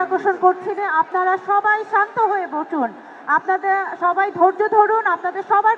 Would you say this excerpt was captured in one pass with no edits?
yes; 0 cuts

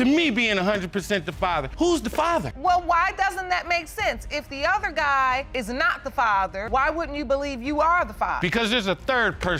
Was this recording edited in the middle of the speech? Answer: no; 0 cuts

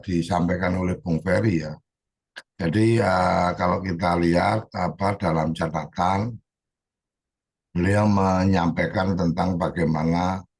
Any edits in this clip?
no; 0 cuts

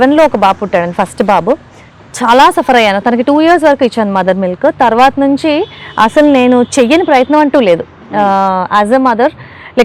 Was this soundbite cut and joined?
no; 0 cuts

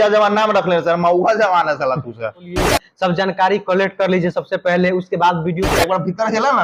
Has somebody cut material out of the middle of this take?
yes; 2 cuts; at 2.6 s, 5.6 s

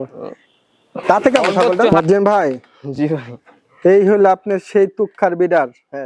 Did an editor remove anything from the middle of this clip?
yes; 1 cut; at 1.9 s

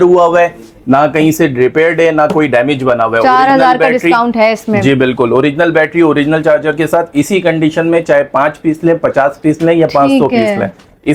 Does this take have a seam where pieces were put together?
no; 0 cuts

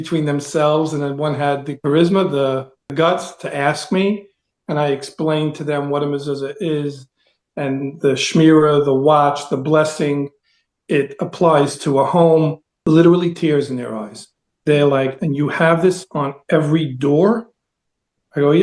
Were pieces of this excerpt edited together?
yes; 1 cut; at 1.8 s

